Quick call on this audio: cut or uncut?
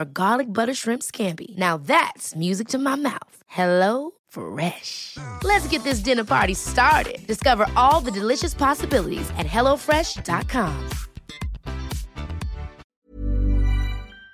cut